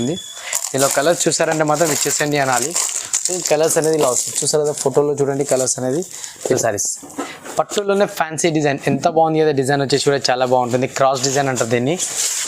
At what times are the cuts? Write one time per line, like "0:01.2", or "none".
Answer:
0:06.6